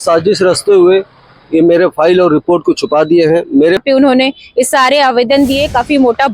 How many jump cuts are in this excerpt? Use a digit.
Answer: 1